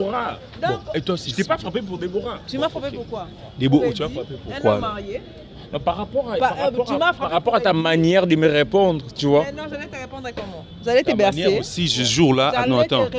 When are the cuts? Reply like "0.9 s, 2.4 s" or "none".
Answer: none